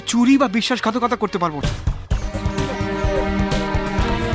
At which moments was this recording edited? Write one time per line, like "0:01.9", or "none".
0:01.6